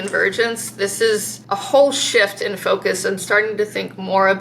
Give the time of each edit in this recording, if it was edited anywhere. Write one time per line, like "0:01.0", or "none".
0:01.4